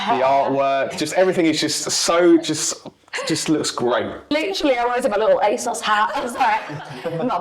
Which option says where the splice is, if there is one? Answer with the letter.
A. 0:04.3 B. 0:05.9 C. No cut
A